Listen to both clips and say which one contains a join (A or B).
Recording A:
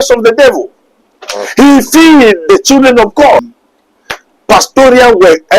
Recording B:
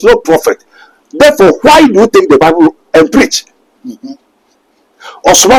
A